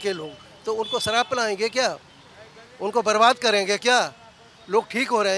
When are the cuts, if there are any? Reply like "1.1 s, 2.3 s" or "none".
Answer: none